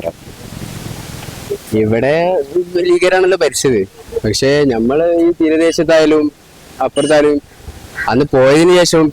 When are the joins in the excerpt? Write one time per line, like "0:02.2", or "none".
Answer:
0:01.4